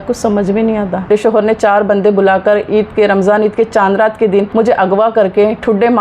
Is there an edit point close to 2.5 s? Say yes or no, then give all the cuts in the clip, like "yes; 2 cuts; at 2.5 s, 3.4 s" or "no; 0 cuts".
no; 2 cuts; at 1.1 s, 4.5 s